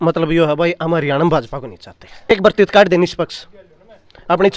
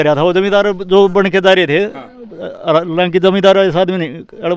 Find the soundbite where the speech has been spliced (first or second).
first